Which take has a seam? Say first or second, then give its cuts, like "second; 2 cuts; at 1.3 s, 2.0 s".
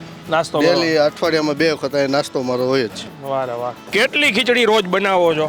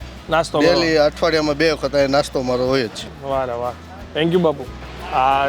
first; 1 cut; at 3.8 s